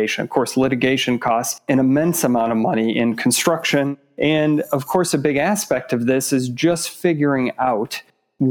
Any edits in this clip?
yes; 2 cuts; at 1.6 s, 3.9 s

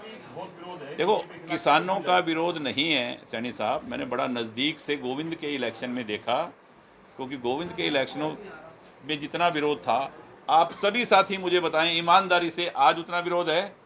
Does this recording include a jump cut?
no; 0 cuts

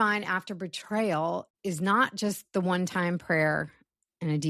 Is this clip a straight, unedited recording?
no; 1 cut; at 1.5 s

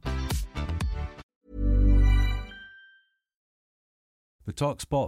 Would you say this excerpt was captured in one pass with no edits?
no; 1 cut; at 3.6 s

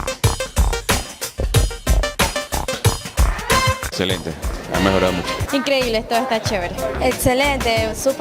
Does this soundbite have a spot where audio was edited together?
yes; 1 cut; at 0.9 s

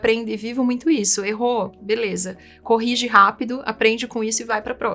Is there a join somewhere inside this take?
no; 0 cuts

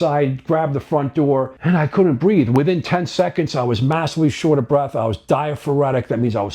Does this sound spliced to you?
yes; 1 cut; at 1.5 s

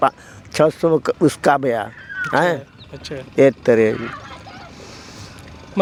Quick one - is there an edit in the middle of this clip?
no; 0 cuts

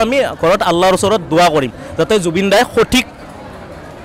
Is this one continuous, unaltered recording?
yes; 0 cuts

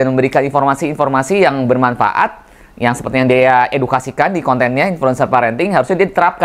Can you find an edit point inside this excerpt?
no; 0 cuts

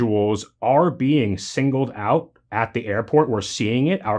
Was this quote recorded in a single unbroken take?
yes; 0 cuts

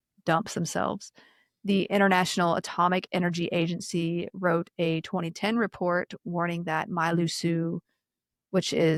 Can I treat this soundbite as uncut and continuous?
yes; 0 cuts

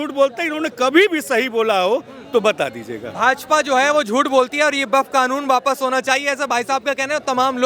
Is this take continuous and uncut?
yes; 0 cuts

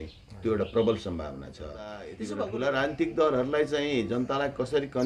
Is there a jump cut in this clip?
yes; 1 cut; at 2.2 s

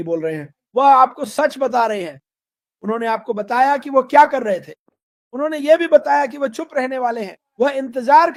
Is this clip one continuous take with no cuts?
yes; 0 cuts

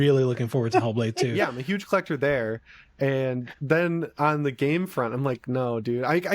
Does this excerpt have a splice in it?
yes; 1 cut; at 1.3 s

